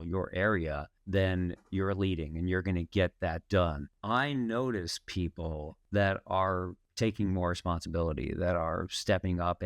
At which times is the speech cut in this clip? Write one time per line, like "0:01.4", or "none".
0:00.9
0:03.9
0:05.7
0:06.8